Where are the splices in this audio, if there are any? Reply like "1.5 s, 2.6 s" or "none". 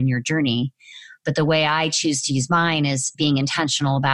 3.1 s